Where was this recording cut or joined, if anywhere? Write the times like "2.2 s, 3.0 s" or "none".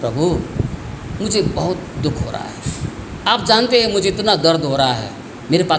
none